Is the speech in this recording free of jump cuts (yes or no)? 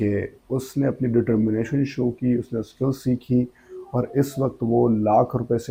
yes